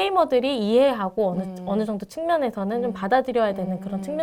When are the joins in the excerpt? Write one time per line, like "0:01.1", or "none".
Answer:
none